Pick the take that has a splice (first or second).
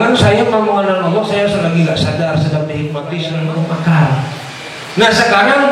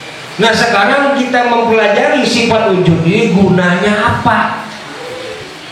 first